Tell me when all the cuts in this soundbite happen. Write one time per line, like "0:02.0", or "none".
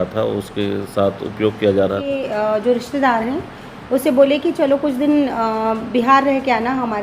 0:02.1